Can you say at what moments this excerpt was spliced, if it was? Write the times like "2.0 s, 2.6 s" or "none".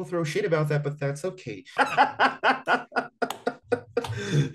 1.6 s